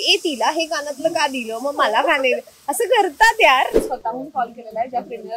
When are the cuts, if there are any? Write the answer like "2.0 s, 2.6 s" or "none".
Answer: 3.9 s